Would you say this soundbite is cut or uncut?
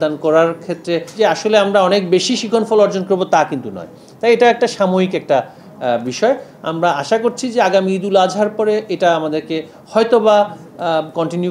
cut